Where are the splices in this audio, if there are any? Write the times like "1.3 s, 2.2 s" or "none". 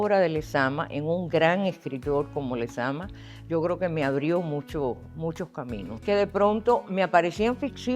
6.0 s

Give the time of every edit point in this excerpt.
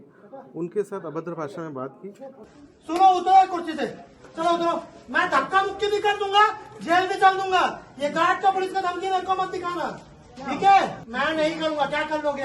2.4 s, 11.0 s

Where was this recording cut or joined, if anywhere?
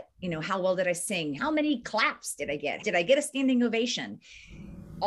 1.4 s, 2.8 s

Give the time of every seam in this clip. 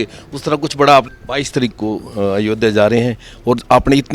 1.2 s

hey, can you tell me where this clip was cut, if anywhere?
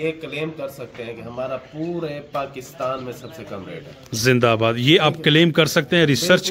none

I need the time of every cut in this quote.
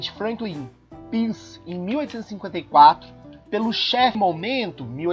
4.2 s

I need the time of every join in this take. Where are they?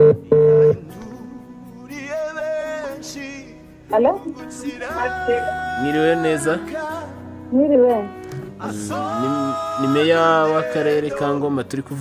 none

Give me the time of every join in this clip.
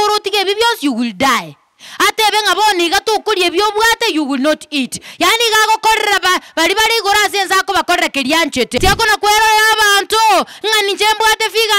8.7 s

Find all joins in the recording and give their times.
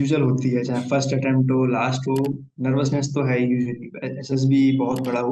none

